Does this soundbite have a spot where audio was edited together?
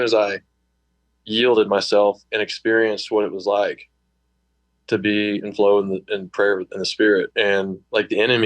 yes; 1 cut; at 7.4 s

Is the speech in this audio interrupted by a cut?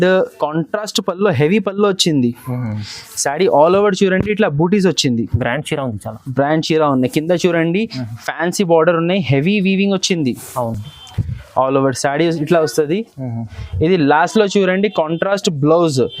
no; 0 cuts

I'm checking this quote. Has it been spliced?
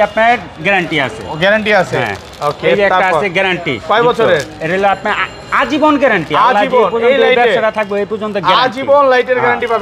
no; 0 cuts

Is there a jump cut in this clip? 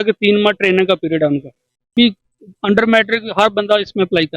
yes; 1 cut; at 1.9 s

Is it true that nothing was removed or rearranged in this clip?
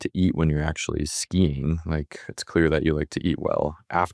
yes; 0 cuts

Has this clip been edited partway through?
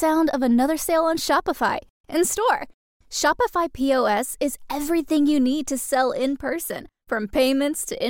no; 0 cuts

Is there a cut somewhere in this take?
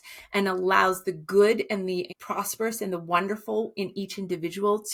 no; 0 cuts

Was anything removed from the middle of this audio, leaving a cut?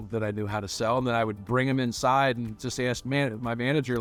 no; 0 cuts

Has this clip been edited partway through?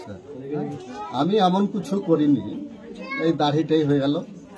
no; 0 cuts

